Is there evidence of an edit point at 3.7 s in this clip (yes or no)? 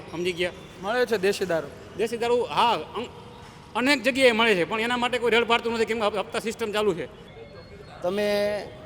no